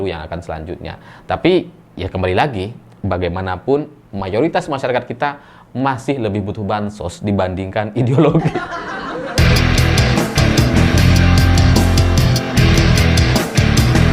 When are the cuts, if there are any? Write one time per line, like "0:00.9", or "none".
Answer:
0:08.7